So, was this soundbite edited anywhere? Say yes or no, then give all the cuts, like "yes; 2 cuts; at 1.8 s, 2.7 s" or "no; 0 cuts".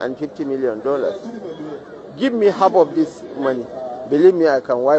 no; 0 cuts